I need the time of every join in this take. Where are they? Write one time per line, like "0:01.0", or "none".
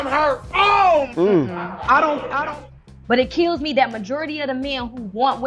0:02.6